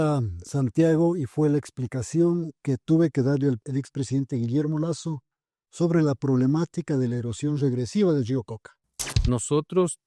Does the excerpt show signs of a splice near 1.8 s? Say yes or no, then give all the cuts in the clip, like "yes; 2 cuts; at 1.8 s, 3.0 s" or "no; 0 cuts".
no; 2 cuts; at 3.6 s, 9.0 s